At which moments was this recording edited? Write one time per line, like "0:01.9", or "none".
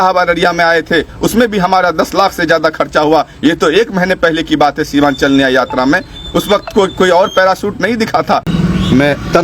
0:08.5